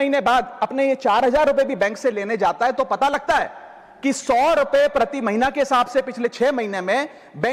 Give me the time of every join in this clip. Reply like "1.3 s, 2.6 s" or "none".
none